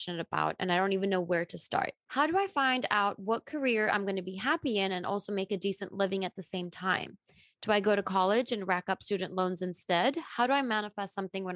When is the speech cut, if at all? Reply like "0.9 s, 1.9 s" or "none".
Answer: 2.0 s